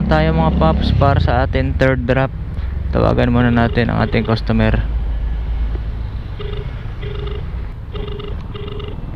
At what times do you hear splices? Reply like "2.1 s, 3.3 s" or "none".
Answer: none